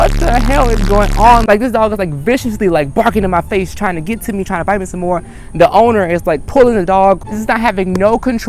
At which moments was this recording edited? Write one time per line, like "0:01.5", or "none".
none